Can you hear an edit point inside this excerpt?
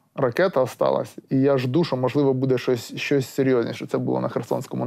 no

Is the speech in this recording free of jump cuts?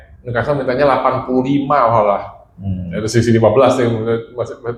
yes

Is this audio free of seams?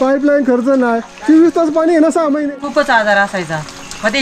no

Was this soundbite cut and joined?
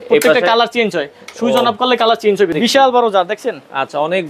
yes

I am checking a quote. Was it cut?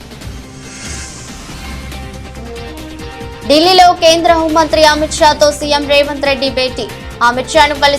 yes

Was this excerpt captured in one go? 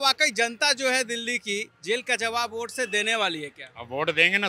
yes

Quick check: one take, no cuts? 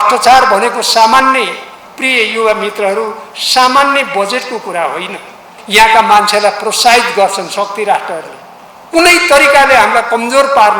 no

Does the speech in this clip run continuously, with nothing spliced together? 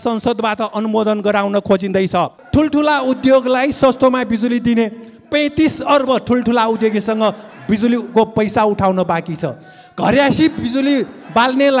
no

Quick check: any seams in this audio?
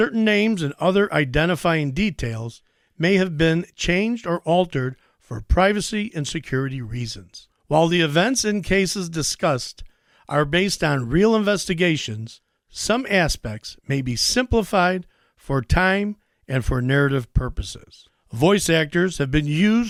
no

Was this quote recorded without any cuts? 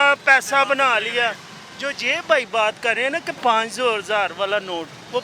yes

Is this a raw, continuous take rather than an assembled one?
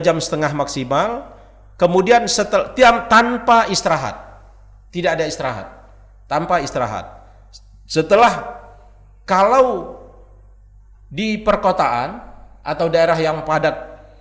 yes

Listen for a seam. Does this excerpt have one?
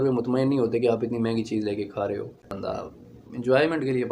yes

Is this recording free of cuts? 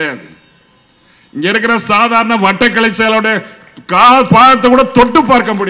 yes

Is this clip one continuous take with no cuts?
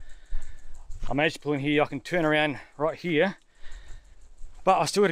yes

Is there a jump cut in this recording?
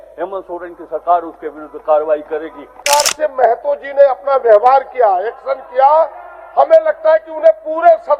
yes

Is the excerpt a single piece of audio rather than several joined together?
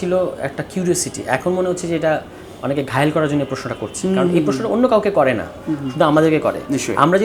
yes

